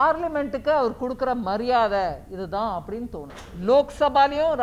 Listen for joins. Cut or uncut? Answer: cut